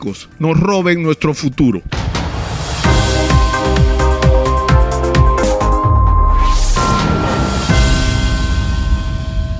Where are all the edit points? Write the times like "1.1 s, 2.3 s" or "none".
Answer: 1.9 s